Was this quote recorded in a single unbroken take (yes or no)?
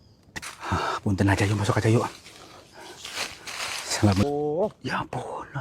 no